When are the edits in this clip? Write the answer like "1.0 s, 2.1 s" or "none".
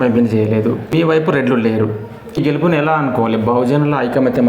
0.9 s, 2.4 s